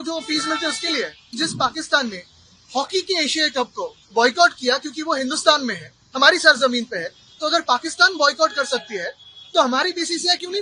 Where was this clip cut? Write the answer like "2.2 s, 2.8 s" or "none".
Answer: 1.3 s